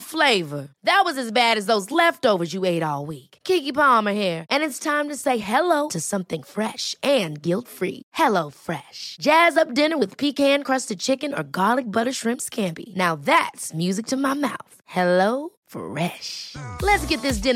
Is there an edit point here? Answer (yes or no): no